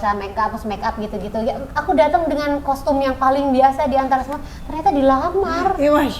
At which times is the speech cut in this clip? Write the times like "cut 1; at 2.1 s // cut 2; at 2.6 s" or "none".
none